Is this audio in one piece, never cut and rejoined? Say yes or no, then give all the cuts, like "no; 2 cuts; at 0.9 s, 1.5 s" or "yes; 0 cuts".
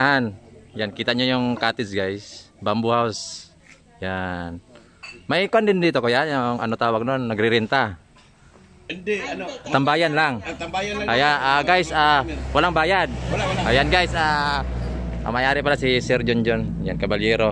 yes; 0 cuts